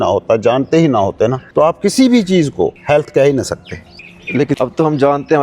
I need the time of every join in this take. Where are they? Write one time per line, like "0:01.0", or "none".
0:01.4
0:02.8
0:04.2

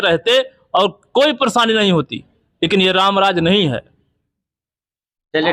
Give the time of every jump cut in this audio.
none

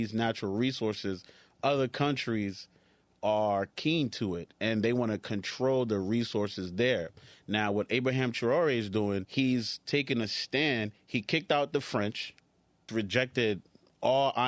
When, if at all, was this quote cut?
0:09.3
0:12.9

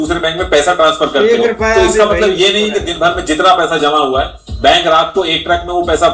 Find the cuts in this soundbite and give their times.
none

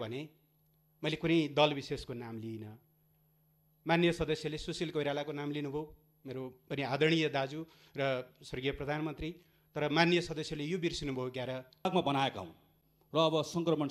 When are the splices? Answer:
0:11.9

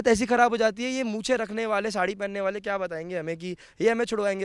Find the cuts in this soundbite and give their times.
none

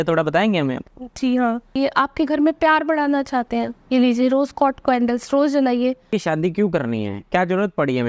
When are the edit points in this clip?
0:01.7
0:06.1

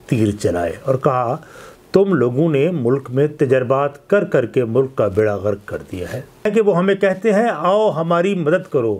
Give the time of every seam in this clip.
0:06.4

